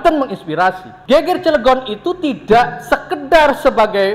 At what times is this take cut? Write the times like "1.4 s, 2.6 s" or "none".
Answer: 0.9 s